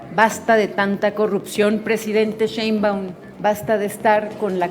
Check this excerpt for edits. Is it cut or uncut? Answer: cut